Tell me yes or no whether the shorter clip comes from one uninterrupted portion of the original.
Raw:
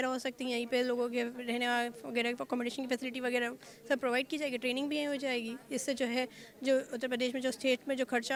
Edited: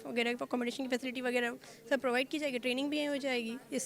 yes